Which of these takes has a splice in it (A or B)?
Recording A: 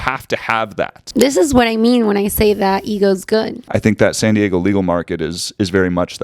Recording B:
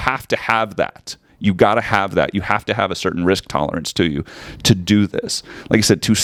A